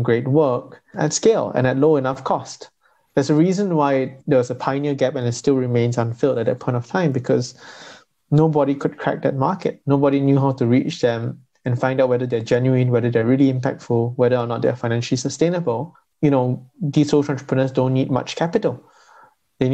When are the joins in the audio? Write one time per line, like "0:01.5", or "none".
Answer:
0:00.9
0:04.2
0:16.0